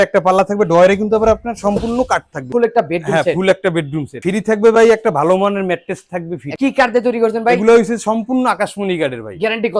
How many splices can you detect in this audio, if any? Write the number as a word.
three